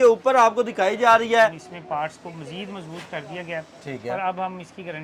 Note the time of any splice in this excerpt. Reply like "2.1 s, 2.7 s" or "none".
1.7 s